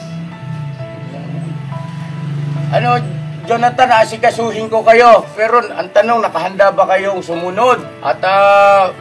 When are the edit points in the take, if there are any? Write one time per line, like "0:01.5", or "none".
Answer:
0:07.9